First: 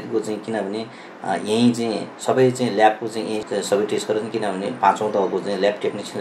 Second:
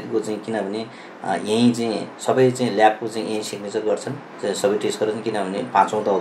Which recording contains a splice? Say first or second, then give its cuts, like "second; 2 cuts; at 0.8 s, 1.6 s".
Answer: first; 1 cut; at 3.5 s